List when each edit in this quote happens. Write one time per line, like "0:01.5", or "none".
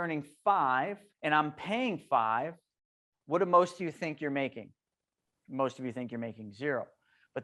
0:01.1